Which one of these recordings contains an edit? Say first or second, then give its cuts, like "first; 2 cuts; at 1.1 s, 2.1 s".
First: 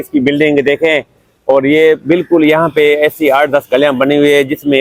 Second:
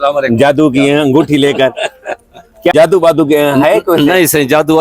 second; 1 cut; at 2.7 s